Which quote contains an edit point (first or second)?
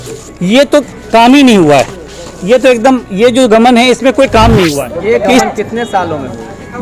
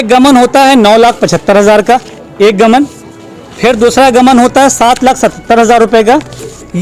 first